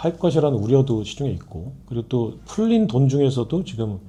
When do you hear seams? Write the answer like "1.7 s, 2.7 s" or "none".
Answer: none